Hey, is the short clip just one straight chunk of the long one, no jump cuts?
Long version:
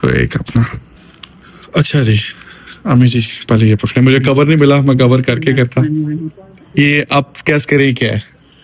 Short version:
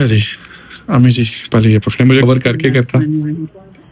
no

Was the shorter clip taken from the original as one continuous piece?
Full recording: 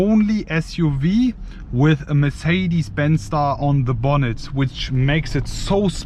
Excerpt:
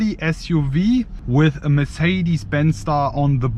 no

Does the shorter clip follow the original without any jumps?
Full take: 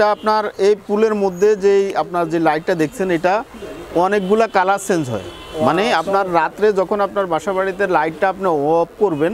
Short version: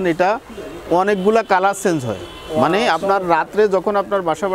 yes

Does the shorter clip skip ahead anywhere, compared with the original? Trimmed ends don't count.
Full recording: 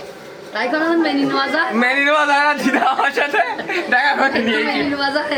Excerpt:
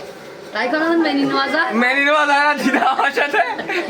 no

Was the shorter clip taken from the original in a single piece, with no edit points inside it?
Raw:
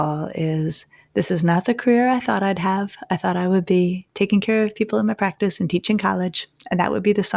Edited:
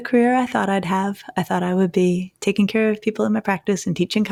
yes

